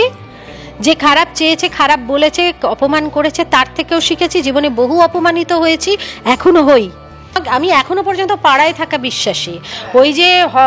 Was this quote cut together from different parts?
yes; 1 cut; at 7.4 s

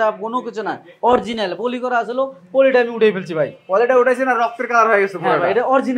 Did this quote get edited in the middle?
no; 0 cuts

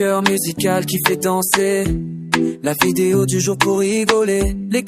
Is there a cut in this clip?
yes; 1 cut; at 2.6 s

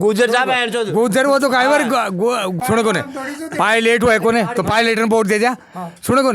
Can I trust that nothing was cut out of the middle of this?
no; 1 cut; at 2.5 s

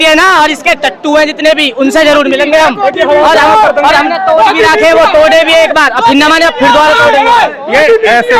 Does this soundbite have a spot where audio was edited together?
no; 0 cuts

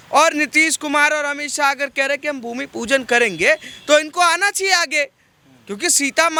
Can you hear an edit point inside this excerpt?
no; 0 cuts

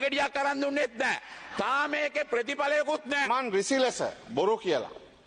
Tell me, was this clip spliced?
yes; 1 cut; at 3.3 s

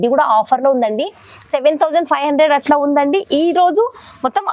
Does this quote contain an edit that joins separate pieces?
no; 0 cuts

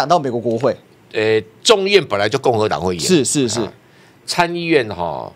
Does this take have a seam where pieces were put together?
no; 0 cuts

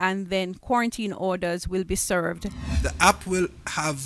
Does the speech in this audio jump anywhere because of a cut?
yes; 1 cut; at 2.6 s

